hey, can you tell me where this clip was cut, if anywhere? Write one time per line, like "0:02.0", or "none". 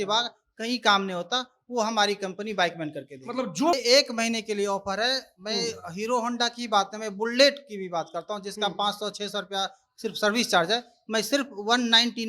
0:03.8